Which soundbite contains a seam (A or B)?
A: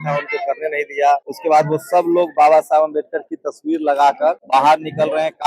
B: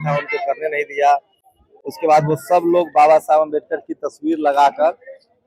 A